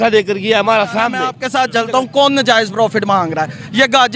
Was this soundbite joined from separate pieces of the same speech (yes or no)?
yes